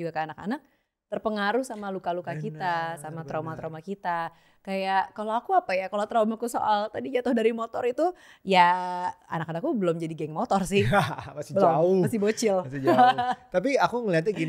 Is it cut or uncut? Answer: uncut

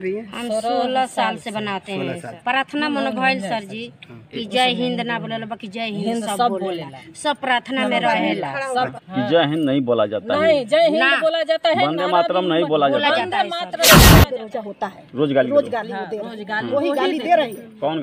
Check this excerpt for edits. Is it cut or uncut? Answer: cut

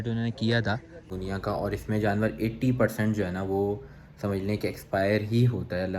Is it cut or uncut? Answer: cut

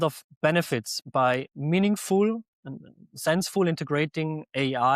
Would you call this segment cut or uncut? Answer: cut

